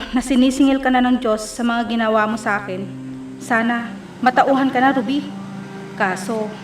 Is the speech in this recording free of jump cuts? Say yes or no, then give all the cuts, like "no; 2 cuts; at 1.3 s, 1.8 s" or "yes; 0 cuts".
yes; 0 cuts